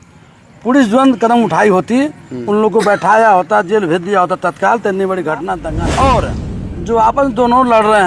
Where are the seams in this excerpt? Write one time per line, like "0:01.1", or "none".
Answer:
0:05.7